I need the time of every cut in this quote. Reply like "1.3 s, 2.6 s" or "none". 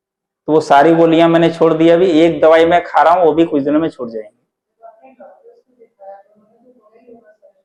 none